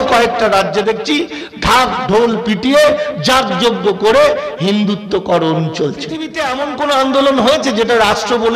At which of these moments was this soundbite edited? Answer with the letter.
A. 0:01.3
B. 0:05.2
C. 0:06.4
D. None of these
C